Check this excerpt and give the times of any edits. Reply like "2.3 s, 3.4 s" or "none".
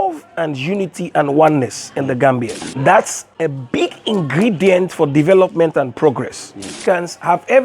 2.6 s, 3.2 s, 6.8 s